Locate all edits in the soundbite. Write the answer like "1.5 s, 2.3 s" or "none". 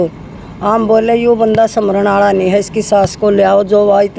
none

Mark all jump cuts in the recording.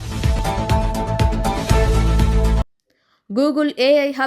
2.6 s

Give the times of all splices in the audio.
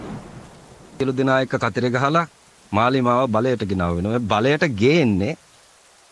1.0 s

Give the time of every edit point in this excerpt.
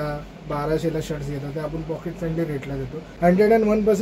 3.0 s

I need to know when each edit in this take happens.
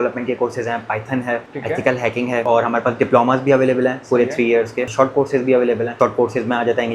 1.5 s, 2.4 s, 4.9 s, 5.9 s

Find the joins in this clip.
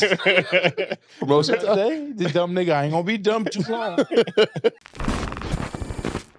4.8 s

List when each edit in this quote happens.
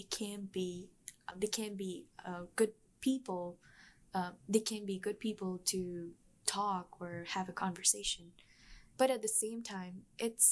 1.3 s, 8.8 s

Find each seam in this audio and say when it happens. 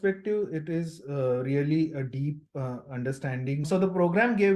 3.6 s

